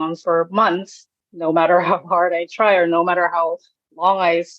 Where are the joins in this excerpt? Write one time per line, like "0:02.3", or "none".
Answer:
0:01.2